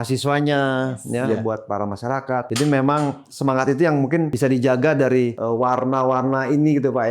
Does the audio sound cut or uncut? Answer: cut